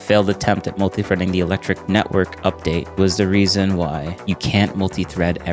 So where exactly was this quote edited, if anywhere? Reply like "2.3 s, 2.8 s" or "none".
1.8 s, 2.9 s, 4.1 s